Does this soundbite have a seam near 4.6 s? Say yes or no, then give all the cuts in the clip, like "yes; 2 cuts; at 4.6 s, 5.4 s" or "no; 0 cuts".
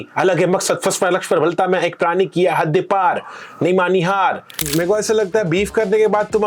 yes; 1 cut; at 4.6 s